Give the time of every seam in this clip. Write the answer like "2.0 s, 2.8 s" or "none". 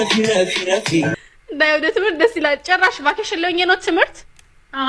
1.1 s